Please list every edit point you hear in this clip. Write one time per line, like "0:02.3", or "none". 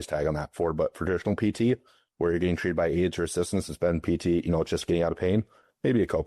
none